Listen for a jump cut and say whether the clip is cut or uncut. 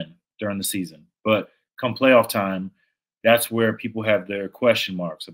uncut